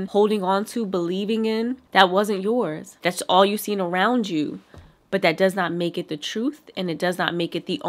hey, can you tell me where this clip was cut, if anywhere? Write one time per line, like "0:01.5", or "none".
0:01.8
0:03.0

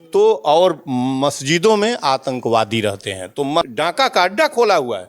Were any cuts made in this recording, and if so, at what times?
0:03.7

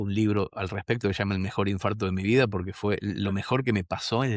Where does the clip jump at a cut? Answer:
none

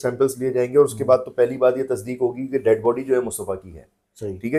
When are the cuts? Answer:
none

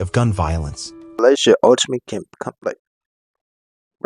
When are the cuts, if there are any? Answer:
0:01.2

